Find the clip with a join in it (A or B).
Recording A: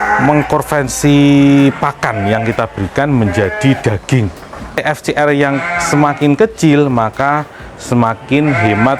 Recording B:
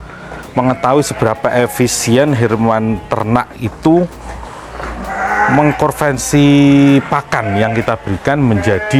A